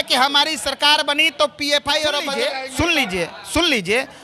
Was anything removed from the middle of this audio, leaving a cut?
yes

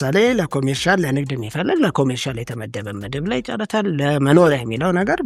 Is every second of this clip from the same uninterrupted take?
yes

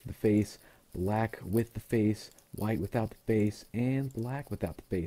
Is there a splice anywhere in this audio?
yes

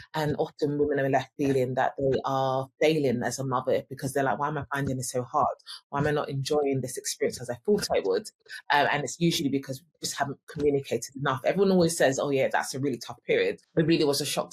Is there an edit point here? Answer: yes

